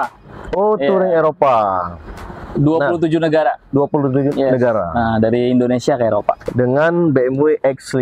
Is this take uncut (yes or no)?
yes